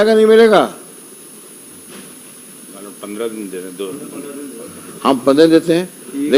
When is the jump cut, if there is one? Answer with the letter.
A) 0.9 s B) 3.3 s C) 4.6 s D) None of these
D